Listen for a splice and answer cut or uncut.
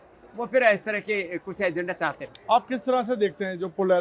cut